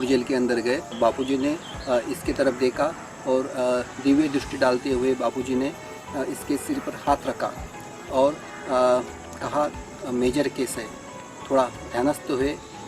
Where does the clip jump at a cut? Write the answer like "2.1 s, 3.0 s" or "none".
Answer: 0.9 s